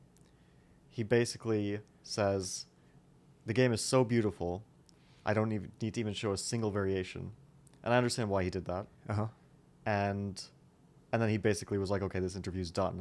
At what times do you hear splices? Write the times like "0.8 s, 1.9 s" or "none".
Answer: 7.6 s